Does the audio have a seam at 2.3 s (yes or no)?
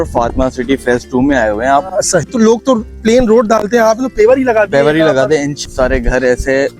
yes